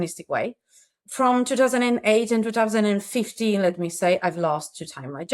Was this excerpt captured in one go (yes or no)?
no